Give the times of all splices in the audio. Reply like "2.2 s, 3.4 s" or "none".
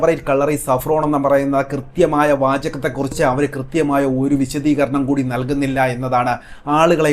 none